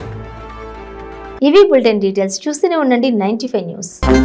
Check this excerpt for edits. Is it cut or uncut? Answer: uncut